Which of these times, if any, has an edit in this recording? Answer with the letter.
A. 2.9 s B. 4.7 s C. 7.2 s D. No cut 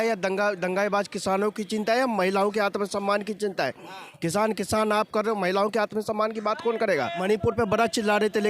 C